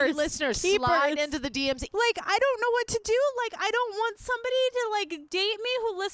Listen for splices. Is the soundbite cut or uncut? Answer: cut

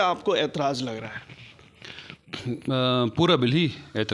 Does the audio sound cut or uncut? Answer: uncut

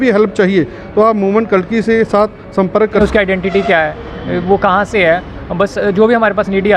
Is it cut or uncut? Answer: cut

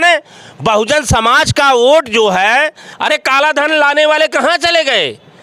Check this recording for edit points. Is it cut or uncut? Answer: cut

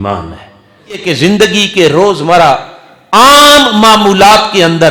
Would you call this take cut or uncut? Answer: cut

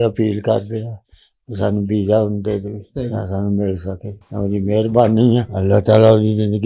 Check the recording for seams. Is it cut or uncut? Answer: uncut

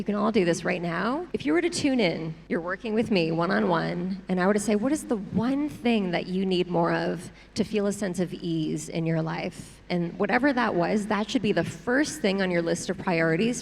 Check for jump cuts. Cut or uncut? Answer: cut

